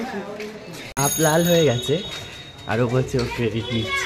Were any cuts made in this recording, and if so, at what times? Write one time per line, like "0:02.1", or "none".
0:01.0